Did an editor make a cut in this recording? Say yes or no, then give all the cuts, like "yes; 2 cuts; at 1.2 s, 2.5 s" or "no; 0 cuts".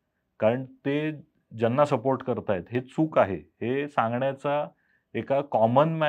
no; 0 cuts